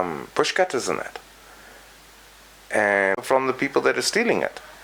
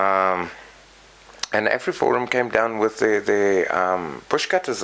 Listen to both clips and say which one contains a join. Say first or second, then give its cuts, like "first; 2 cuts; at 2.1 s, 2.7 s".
first; 1 cut; at 3.2 s